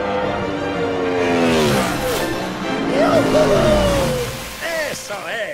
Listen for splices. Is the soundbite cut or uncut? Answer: uncut